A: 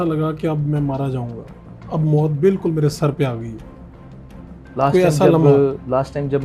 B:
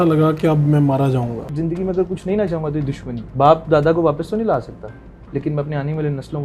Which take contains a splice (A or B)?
B